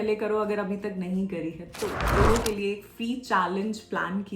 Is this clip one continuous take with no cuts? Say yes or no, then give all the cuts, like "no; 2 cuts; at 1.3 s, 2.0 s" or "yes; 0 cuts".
no; 1 cut; at 2.1 s